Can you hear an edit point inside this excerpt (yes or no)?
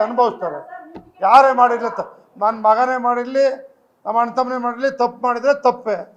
no